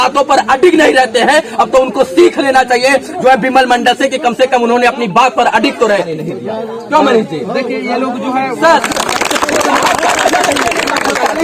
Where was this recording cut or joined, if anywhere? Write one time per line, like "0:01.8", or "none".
0:06.1